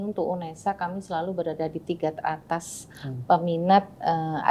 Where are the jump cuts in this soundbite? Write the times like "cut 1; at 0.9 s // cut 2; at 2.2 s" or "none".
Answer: none